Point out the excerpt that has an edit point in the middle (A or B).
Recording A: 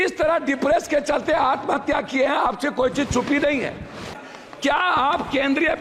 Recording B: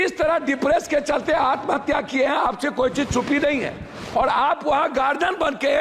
A